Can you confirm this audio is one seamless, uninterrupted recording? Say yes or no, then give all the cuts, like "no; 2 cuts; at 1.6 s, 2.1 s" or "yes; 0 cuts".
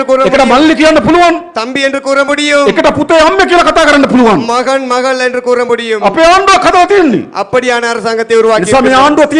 yes; 0 cuts